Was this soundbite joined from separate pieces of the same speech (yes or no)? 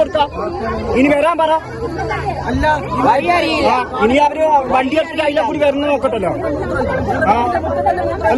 no